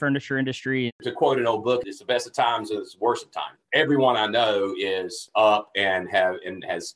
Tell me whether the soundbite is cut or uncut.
cut